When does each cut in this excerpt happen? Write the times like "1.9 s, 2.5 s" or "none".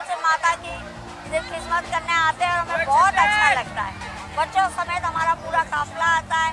none